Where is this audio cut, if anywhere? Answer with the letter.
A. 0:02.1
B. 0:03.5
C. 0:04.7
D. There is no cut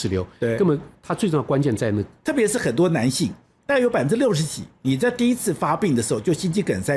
A